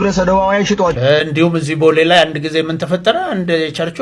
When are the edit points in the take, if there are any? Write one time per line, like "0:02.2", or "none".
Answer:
0:01.0